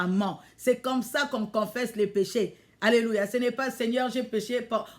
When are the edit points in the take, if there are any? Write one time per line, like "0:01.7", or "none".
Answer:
none